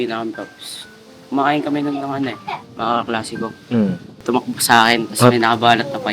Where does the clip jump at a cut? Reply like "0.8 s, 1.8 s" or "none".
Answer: 4.1 s